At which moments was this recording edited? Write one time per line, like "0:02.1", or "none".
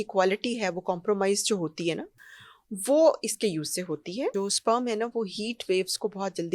0:04.3